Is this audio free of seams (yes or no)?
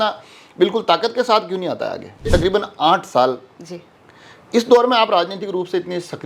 no